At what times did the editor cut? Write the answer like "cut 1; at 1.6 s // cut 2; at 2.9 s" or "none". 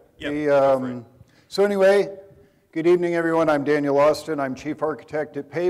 none